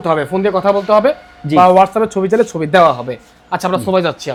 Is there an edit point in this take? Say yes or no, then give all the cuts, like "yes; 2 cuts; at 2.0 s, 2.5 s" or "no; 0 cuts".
no; 0 cuts